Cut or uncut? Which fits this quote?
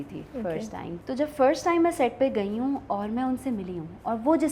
cut